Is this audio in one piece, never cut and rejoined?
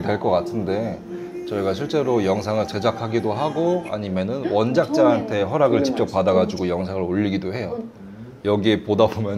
no; 1 cut; at 8.3 s

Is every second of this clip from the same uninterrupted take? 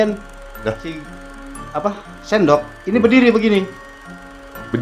no; 1 cut; at 1.1 s

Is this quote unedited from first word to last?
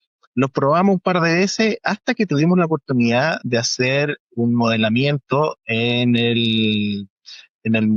yes; 0 cuts

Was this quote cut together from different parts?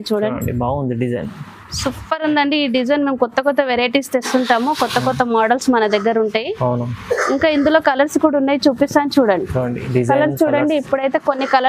no; 0 cuts

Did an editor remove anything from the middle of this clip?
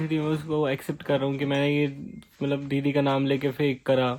no; 0 cuts

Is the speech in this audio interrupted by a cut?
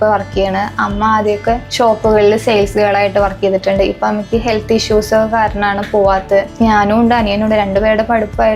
yes; 2 cuts; at 1.7 s, 6.5 s

